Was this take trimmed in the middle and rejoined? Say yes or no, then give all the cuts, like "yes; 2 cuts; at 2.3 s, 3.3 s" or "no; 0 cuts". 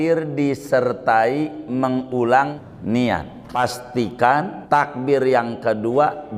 yes; 3 cuts; at 2.5 s, 3.6 s, 4.6 s